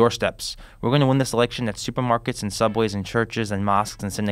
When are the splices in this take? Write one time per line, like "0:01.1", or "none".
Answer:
none